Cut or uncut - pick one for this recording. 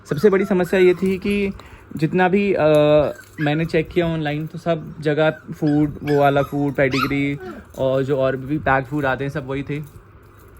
uncut